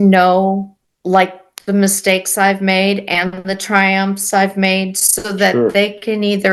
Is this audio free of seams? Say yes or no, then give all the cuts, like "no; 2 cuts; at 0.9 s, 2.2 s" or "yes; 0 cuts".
yes; 0 cuts